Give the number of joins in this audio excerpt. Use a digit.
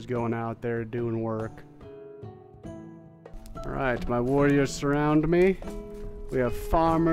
1